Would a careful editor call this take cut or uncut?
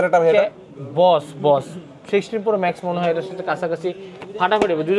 uncut